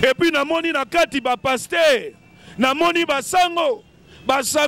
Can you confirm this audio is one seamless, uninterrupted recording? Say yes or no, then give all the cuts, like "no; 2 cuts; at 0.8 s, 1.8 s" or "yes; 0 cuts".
yes; 0 cuts